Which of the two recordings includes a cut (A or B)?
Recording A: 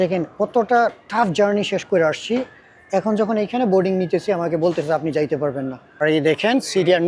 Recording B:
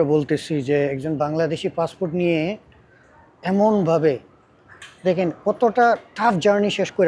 A